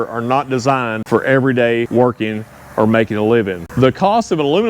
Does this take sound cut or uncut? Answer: cut